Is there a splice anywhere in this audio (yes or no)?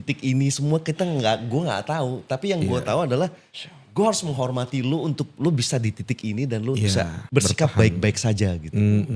no